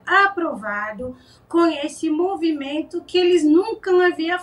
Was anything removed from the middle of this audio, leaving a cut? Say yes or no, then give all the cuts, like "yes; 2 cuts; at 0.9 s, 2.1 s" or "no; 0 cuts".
no; 0 cuts